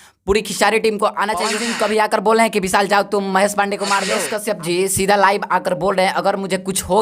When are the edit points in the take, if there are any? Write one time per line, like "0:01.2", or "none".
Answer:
0:01.6
0:04.2